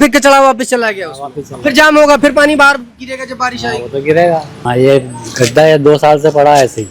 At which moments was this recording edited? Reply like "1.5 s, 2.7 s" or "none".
4.6 s